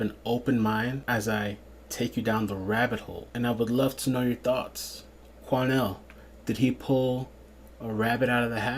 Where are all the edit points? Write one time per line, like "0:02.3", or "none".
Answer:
0:01.0
0:03.2